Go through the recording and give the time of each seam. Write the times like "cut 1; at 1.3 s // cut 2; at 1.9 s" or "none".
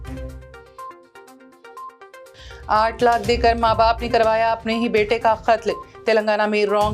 cut 1; at 1.4 s

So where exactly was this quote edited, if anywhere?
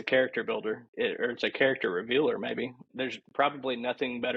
cut 1; at 2.9 s

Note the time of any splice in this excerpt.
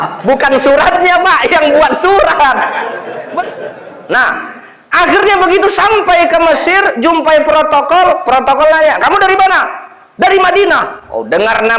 cut 1; at 3.4 s

